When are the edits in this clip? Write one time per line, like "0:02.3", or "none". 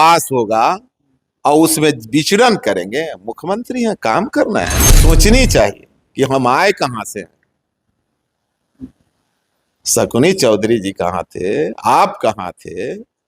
0:04.9

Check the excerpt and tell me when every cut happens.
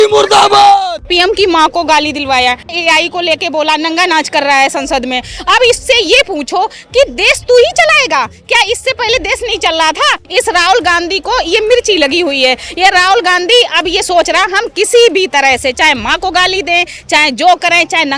0:01.0
0:02.8
0:10.2

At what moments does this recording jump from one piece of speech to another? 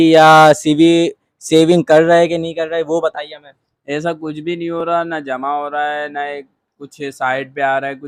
none

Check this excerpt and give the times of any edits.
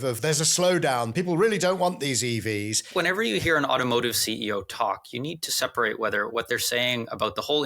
0:02.8

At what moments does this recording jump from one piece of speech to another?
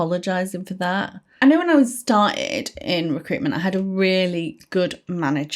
0:01.4

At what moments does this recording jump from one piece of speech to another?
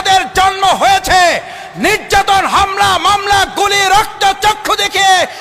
none

